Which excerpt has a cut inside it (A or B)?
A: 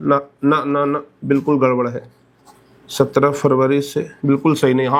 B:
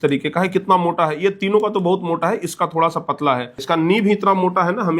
B